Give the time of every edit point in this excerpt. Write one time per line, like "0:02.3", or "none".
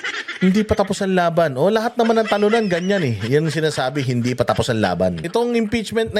0:05.2